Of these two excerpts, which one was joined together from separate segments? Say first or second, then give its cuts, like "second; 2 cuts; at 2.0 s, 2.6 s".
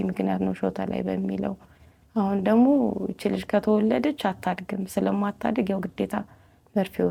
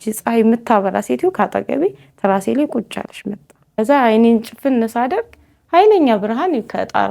second; 1 cut; at 3.8 s